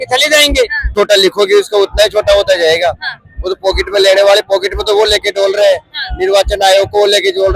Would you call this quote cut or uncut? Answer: cut